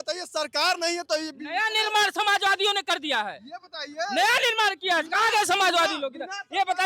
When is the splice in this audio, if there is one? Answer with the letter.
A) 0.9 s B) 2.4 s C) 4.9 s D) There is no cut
D